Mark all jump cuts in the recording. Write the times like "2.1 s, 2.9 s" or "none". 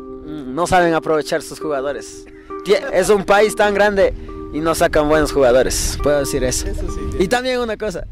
7.1 s